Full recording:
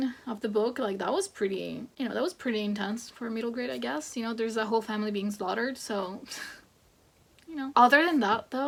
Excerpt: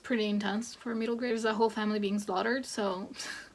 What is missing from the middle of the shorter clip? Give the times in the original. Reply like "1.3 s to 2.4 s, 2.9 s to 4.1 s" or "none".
3.7 s to 4.4 s